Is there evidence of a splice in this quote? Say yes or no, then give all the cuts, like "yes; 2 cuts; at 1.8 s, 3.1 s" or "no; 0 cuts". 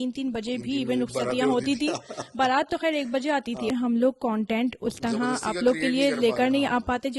yes; 1 cut; at 3.7 s